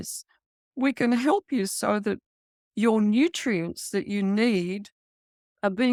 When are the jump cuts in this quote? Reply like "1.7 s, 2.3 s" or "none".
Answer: none

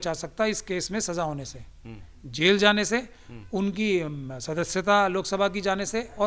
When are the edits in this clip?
none

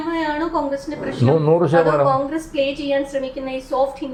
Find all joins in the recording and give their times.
none

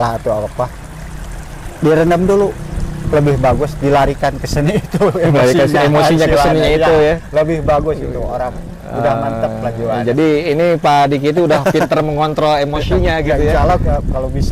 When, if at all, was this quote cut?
none

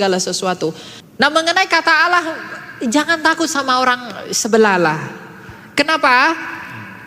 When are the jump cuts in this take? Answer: 0.9 s

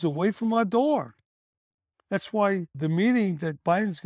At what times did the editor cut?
2.7 s

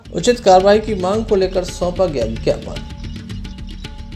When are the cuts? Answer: 3.0 s

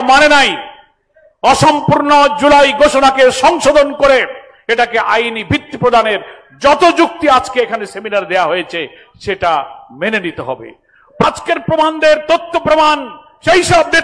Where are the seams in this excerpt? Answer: 11.2 s

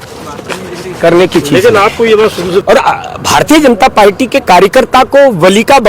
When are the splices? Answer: 2.6 s

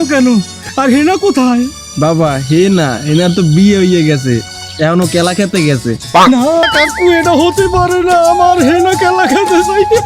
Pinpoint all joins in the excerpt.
6.6 s

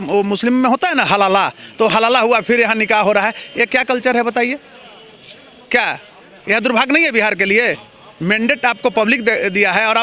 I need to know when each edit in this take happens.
none

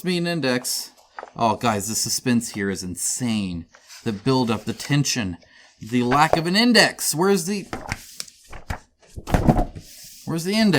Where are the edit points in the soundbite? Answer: none

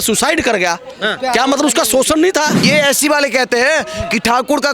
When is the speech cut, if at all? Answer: 2.6 s

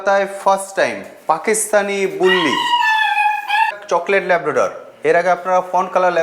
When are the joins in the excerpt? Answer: 3.7 s

